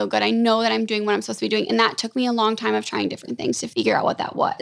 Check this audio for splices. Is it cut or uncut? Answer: cut